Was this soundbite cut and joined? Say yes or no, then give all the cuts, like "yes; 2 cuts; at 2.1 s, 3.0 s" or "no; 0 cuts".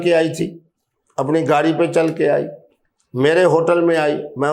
no; 0 cuts